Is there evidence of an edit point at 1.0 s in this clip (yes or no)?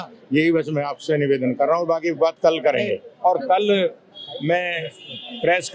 no